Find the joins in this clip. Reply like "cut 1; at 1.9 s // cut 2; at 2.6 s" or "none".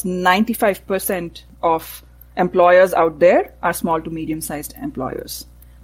cut 1; at 1.5 s